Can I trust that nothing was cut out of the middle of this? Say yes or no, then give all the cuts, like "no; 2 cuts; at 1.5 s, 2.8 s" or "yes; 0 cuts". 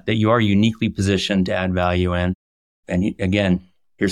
no; 1 cut; at 2.7 s